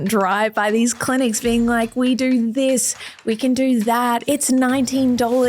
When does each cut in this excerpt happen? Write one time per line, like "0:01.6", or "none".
0:04.2